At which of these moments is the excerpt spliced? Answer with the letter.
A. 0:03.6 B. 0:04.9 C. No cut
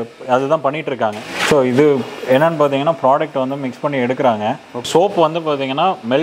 B